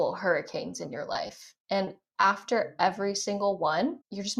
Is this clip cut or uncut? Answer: uncut